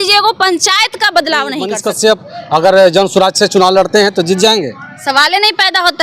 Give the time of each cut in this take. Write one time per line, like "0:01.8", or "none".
0:01.8